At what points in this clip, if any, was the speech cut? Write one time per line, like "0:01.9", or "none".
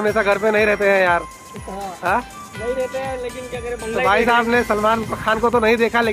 none